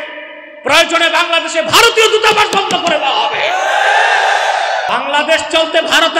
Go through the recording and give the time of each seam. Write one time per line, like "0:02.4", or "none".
0:04.9